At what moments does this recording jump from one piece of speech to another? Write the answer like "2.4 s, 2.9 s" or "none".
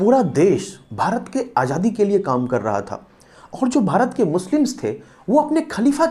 none